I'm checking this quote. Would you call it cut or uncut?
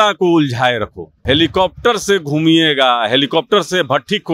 cut